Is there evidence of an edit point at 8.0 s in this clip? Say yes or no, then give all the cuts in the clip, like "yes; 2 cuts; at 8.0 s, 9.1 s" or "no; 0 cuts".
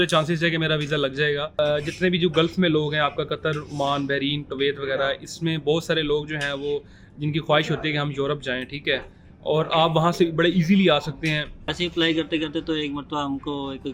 no; 2 cuts; at 1.5 s, 11.7 s